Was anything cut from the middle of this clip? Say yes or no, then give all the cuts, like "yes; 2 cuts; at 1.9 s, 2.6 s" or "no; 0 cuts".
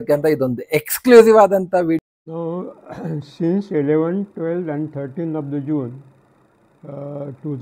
yes; 1 cut; at 2.0 s